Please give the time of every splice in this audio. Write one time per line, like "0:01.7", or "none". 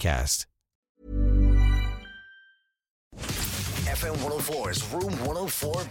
0:03.2